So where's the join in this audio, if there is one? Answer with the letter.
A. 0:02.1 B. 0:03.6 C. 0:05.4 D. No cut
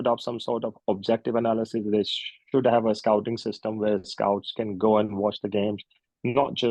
D